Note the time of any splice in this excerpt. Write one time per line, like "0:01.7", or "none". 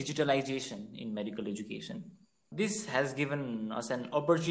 0:02.5